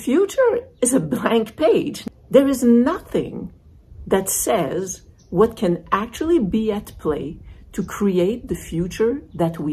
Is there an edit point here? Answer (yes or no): yes